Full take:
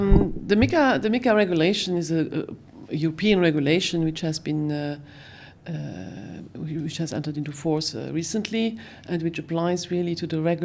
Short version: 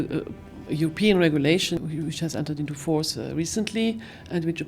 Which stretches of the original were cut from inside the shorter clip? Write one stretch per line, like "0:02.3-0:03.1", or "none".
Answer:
0:04.0-0:06.5